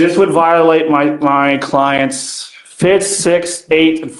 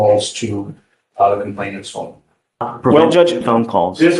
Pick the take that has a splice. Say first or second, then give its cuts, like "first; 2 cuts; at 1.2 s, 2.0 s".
second; 1 cut; at 2.7 s